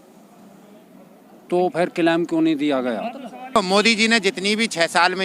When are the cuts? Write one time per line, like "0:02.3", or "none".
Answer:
0:03.6